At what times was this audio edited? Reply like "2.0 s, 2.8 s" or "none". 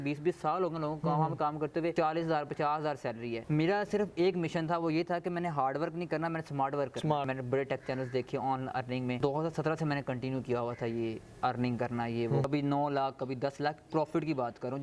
1.9 s, 3.4 s, 7.3 s, 9.2 s, 12.5 s